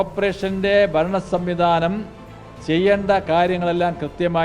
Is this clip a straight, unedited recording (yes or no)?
yes